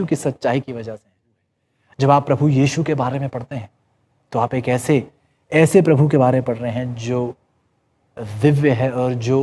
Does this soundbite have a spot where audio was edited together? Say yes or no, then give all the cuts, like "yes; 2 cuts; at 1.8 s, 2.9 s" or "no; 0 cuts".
yes; 1 cut; at 1.5 s